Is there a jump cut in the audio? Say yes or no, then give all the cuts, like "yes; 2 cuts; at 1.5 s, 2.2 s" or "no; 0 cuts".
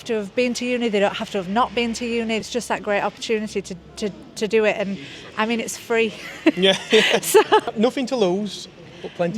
yes; 2 cuts; at 2.4 s, 7.7 s